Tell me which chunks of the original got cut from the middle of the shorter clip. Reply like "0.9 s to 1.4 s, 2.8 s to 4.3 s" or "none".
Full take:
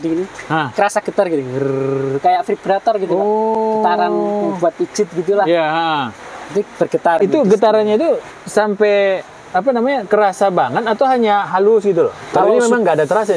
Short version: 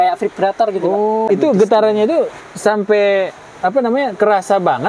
3.6 s to 7.2 s